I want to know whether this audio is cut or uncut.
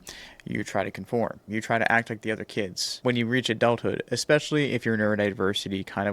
cut